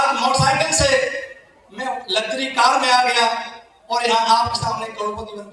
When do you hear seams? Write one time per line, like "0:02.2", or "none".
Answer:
none